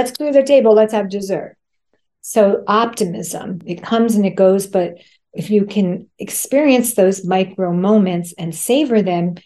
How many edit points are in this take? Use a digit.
1